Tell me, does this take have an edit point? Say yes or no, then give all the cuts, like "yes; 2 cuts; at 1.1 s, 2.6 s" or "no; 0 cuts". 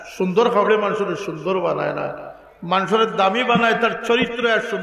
no; 0 cuts